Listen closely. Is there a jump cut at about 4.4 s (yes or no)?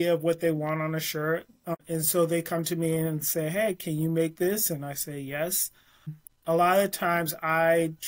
no